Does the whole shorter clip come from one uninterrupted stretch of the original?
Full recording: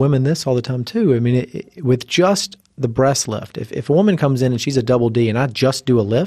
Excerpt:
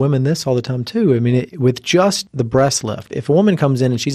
no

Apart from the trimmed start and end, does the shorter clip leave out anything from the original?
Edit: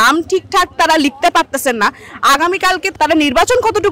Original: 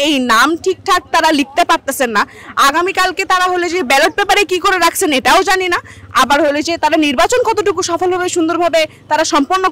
yes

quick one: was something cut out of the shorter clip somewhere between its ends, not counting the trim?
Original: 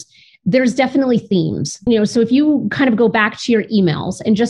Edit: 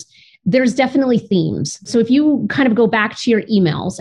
yes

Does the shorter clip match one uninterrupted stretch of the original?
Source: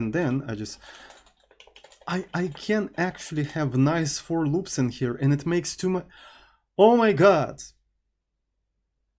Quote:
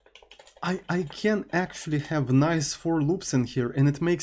yes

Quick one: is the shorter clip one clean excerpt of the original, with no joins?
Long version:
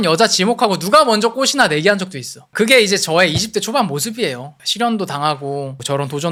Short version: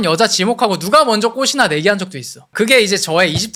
yes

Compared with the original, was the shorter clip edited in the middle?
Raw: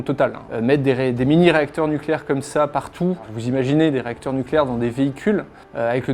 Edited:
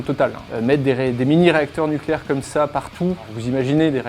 no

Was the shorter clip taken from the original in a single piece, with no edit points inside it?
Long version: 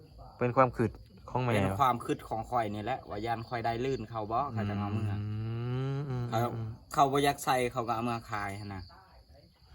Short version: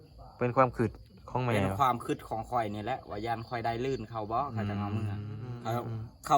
no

